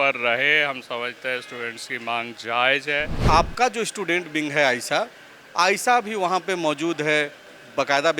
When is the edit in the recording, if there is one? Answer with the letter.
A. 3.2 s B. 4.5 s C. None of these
A